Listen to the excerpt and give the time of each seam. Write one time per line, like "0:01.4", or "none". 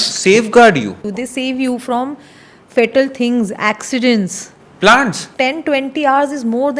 0:01.1
0:05.2

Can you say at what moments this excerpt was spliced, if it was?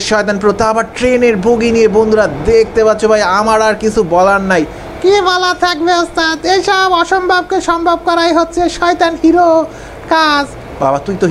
none

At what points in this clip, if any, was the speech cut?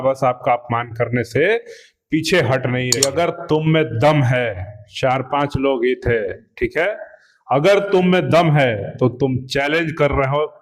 0:02.9

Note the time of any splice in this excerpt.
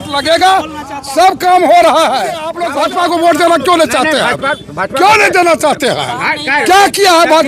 0:02.6

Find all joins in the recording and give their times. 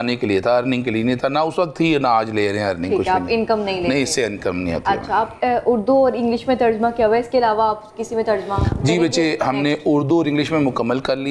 none

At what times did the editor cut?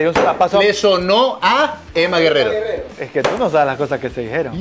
0:01.8
0:02.9

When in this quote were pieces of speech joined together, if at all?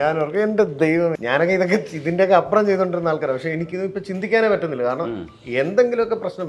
0:01.2
0:03.6

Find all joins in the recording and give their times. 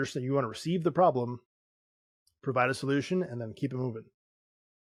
none

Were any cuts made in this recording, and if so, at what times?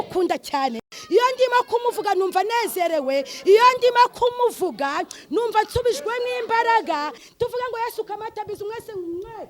0:00.9
0:07.2

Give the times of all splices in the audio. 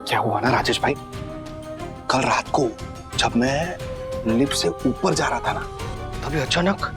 none

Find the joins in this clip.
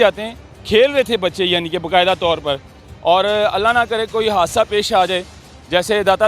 none

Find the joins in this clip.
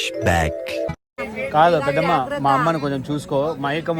0:01.2

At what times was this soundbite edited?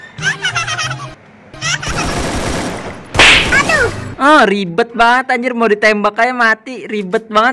none

